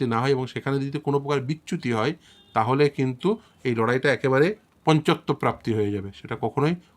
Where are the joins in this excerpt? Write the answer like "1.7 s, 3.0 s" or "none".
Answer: 4.7 s